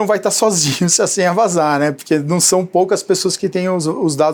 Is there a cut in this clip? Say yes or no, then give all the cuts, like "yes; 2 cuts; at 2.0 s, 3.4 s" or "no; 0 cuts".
no; 0 cuts